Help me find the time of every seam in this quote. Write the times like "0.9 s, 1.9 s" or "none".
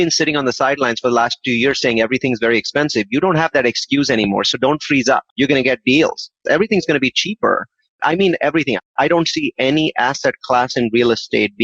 6.4 s, 7.8 s